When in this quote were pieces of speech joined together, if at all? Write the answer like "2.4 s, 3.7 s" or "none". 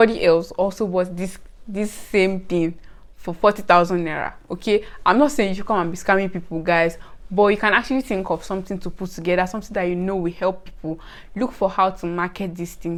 none